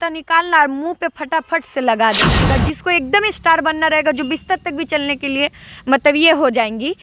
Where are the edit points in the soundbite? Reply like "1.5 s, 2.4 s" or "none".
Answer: 2.3 s